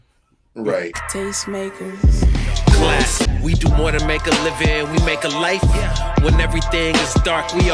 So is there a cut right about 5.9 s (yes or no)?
no